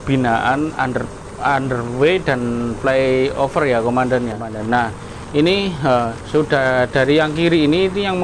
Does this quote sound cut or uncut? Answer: cut